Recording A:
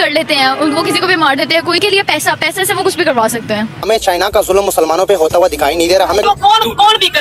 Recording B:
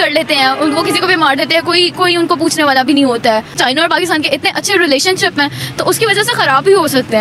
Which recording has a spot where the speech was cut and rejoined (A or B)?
A